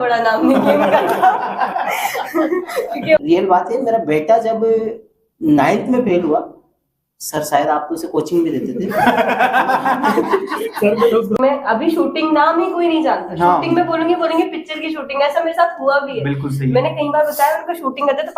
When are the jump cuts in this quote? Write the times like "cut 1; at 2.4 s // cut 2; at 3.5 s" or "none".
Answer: cut 1; at 3.2 s // cut 2; at 11.4 s